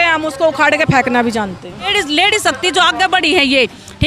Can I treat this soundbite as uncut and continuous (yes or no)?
no